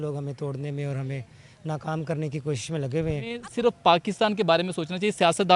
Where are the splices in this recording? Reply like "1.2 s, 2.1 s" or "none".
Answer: 3.4 s